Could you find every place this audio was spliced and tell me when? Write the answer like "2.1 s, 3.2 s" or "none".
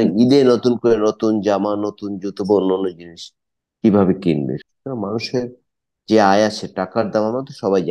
4.6 s